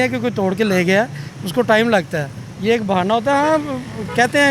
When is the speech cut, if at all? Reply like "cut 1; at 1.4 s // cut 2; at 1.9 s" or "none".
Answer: none